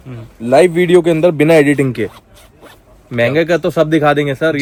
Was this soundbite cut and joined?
no; 0 cuts

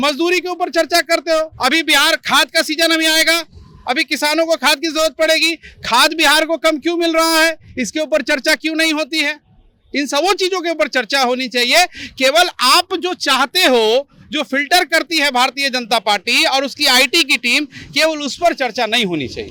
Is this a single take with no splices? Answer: yes; 0 cuts

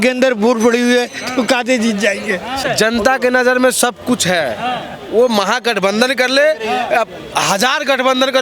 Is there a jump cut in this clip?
yes; 1 cut; at 2.6 s

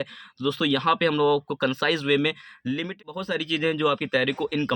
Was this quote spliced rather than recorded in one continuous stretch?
yes; 1 cut; at 2.9 s

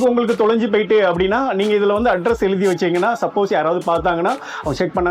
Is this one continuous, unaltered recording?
yes; 0 cuts

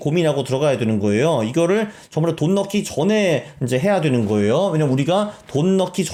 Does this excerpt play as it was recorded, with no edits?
yes; 0 cuts

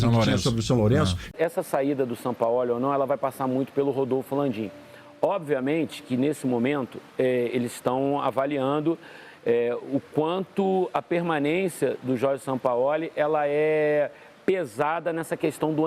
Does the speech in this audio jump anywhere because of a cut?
yes; 1 cut; at 1.2 s

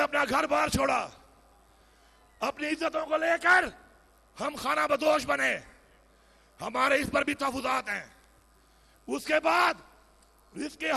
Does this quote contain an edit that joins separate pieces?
no; 0 cuts

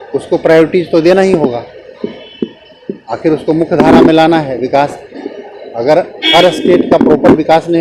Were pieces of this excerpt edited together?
no; 0 cuts

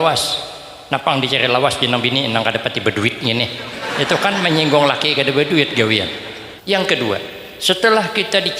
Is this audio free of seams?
no; 1 cut; at 6.5 s

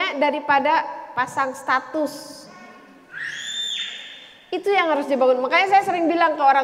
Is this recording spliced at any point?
no; 0 cuts

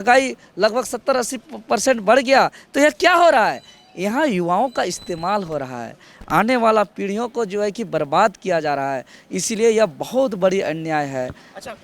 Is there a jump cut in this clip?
no; 0 cuts

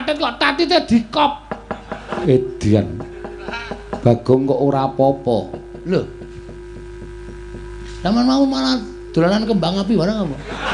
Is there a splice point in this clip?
yes; 1 cut; at 2.2 s

